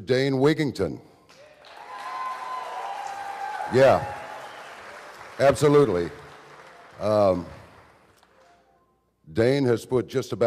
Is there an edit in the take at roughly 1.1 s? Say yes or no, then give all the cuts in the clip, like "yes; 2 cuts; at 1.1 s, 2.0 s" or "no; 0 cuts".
no; 1 cut; at 3.9 s